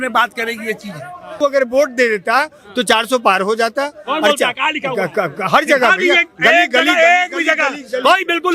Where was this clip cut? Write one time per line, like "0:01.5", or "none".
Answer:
0:01.3